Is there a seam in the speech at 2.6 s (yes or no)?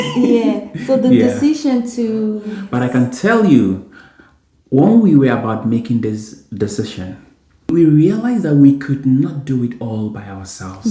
yes